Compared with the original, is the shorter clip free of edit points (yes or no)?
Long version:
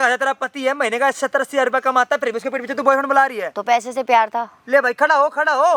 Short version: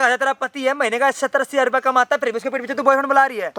yes